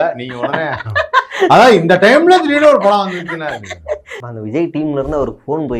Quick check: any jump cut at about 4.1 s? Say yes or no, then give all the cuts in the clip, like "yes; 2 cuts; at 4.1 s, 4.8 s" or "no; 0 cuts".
yes; 1 cut; at 4.1 s